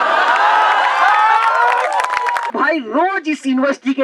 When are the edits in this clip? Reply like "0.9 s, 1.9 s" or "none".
2.5 s